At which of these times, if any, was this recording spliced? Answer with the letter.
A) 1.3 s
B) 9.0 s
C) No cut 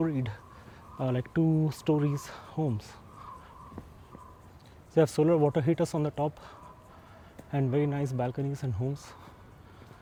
C